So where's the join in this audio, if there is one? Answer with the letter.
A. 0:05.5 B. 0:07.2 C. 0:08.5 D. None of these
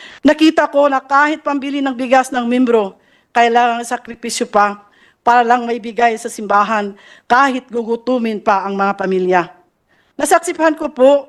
D